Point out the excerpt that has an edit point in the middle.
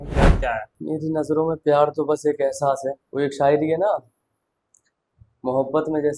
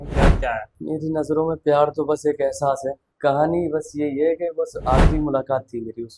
second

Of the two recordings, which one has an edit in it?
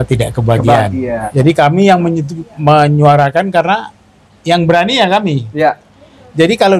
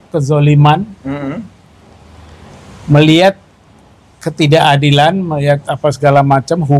first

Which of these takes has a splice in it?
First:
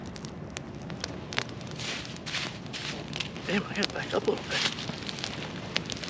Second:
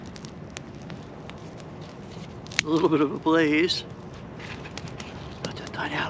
second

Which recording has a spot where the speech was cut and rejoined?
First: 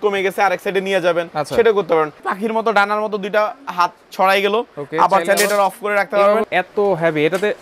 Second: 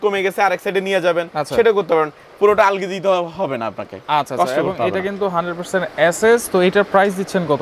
first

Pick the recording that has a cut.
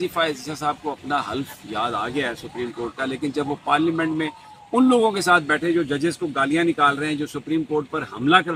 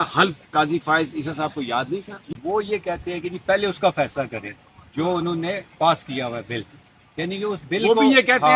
second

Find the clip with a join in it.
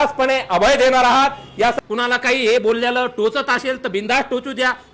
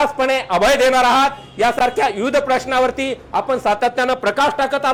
first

